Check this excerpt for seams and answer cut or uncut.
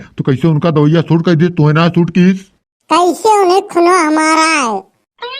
cut